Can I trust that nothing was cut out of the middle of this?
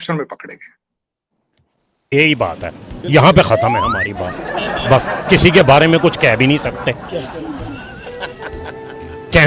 no; 1 cut; at 2.1 s

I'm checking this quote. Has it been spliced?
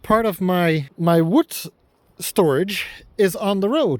yes; 1 cut; at 0.9 s

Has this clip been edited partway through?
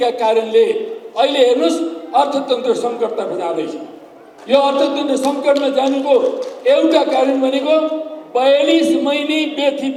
no; 0 cuts

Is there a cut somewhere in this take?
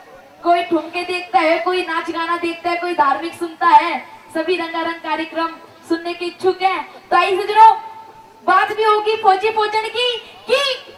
no; 0 cuts

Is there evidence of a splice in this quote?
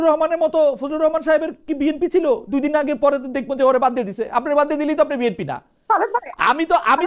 no; 0 cuts

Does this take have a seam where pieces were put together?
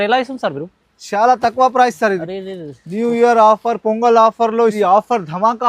yes; 1 cut; at 4.7 s

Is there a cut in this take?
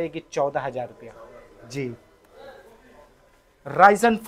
no; 0 cuts

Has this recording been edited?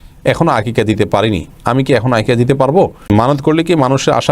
yes; 1 cut; at 3.1 s

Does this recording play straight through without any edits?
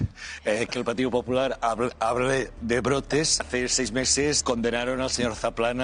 yes; 0 cuts

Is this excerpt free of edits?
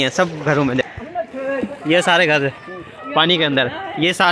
no; 1 cut; at 1.0 s

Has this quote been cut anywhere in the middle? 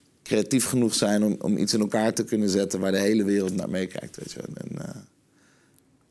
no; 0 cuts

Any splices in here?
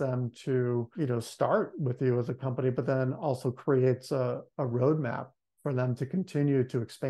yes; 1 cut; at 0.9 s

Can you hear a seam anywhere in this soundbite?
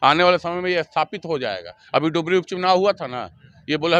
no; 0 cuts

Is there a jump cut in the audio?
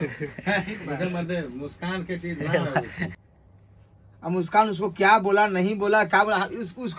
no; 0 cuts

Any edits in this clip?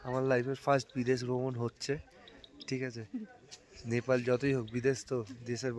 no; 0 cuts

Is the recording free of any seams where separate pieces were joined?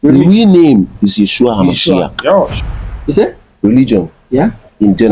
no; 1 cut; at 2.5 s

